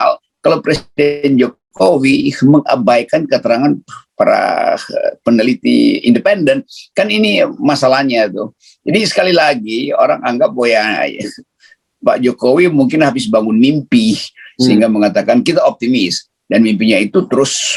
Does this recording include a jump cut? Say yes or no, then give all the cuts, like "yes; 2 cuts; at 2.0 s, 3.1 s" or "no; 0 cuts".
no; 0 cuts